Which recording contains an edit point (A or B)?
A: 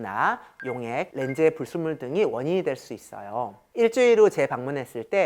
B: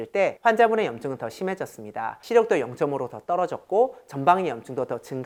A